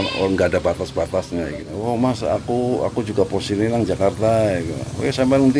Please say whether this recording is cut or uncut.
cut